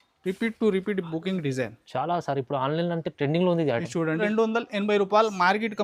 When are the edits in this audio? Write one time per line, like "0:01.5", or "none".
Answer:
0:04.2